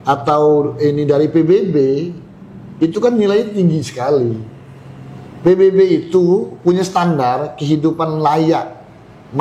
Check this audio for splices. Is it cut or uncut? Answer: uncut